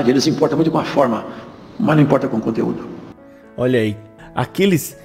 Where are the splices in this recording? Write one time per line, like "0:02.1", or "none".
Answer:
none